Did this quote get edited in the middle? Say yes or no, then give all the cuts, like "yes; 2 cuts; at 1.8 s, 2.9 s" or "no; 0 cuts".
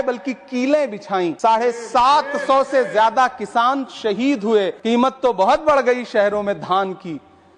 yes; 2 cuts; at 1.4 s, 4.8 s